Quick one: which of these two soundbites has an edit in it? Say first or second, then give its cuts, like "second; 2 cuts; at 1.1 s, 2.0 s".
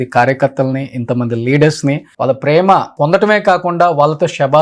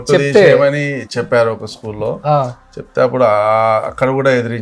first; 2 cuts; at 2.1 s, 2.9 s